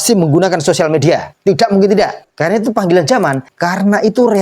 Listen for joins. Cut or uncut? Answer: cut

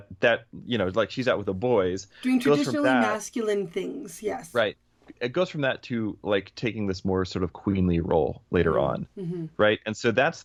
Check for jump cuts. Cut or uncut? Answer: uncut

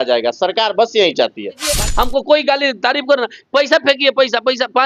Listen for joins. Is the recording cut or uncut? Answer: cut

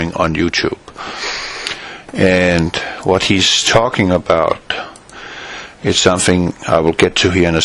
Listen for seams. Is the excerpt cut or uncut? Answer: cut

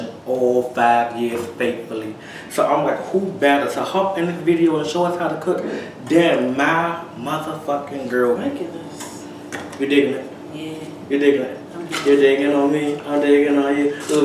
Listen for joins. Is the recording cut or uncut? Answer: uncut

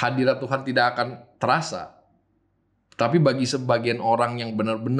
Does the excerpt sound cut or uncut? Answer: uncut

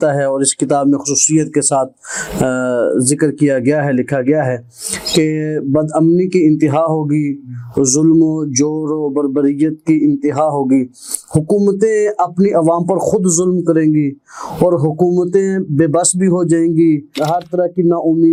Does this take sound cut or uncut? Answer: uncut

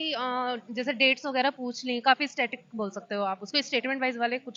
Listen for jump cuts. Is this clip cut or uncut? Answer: uncut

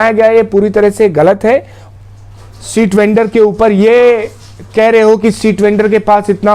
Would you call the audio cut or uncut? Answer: cut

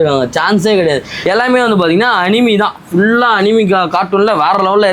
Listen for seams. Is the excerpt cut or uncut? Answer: cut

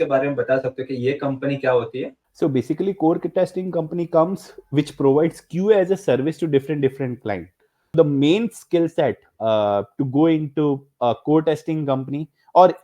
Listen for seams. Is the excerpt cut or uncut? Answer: cut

